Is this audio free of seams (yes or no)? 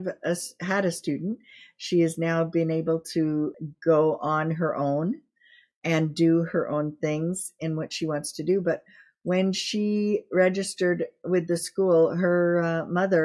no